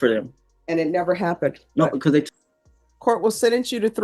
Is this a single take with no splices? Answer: no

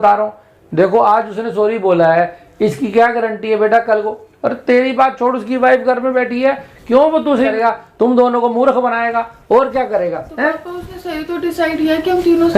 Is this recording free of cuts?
no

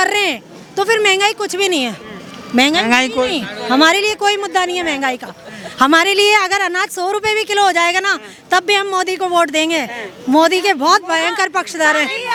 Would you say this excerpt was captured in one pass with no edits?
yes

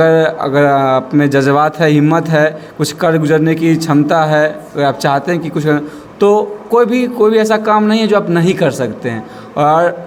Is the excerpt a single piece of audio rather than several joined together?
yes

